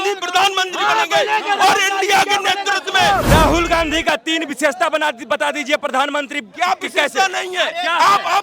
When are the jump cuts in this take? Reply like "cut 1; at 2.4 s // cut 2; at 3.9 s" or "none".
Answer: cut 1; at 3.3 s